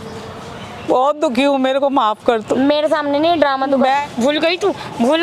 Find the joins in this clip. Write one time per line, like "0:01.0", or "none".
0:03.9

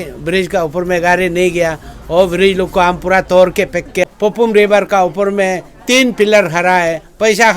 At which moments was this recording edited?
0:04.1

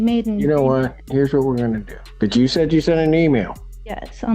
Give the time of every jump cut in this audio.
0:01.0
0:02.0

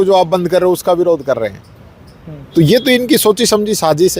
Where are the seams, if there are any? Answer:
none

